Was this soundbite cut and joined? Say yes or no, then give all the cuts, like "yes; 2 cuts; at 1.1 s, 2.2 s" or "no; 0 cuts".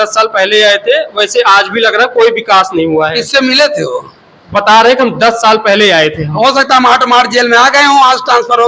no; 0 cuts